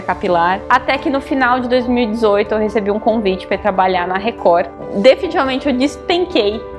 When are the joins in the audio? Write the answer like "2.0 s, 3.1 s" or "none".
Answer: 4.8 s